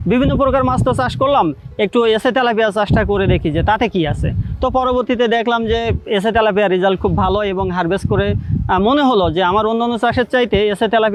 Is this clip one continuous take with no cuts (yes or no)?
yes